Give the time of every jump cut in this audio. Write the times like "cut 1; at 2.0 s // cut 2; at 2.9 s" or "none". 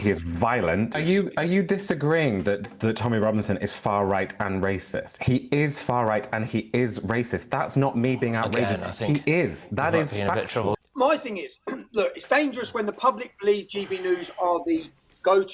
cut 1; at 0.9 s // cut 2; at 10.7 s